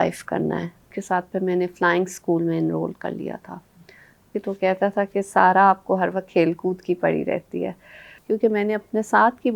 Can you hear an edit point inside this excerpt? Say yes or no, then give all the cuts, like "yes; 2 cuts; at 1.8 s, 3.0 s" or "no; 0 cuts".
yes; 3 cuts; at 0.9 s, 4.3 s, 8.1 s